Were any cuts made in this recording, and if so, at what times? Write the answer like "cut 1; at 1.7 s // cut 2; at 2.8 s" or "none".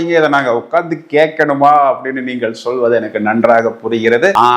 none